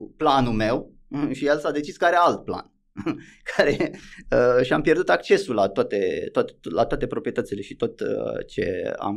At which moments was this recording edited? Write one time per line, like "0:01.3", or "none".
none